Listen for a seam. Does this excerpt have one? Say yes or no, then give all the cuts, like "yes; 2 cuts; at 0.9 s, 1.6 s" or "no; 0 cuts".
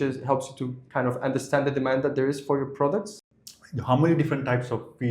yes; 1 cut; at 3.1 s